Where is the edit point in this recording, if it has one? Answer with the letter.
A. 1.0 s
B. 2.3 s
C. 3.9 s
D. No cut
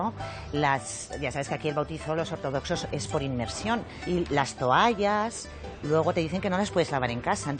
C